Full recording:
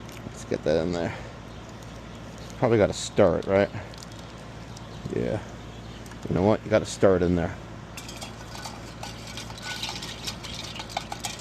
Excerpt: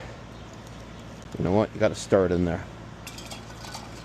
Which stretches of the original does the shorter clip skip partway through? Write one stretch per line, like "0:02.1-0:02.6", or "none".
0:02.3-0:06.0